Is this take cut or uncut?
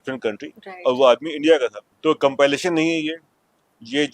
cut